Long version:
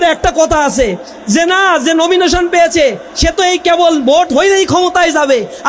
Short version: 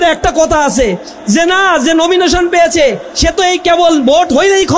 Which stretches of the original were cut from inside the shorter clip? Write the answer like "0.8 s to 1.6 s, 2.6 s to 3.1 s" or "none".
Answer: none